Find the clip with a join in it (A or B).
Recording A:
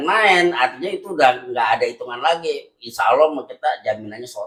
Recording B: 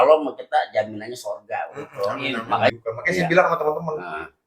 B